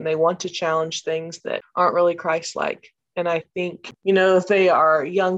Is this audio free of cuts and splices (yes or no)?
no